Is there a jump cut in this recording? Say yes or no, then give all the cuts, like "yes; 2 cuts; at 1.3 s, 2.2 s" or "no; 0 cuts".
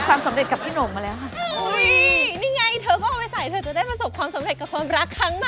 no; 0 cuts